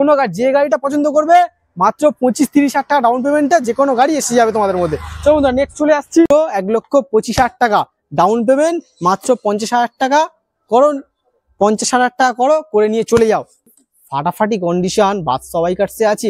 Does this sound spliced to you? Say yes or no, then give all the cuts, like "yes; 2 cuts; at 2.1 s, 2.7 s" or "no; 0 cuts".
yes; 2 cuts; at 6.3 s, 13.7 s